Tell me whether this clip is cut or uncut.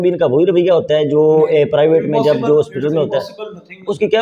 uncut